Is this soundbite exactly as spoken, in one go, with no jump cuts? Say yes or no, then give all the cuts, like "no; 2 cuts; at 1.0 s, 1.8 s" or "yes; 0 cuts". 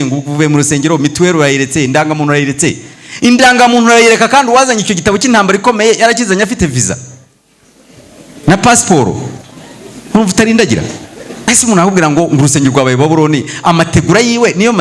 no; 1 cut; at 11.5 s